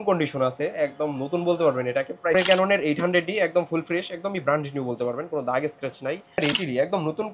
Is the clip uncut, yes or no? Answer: no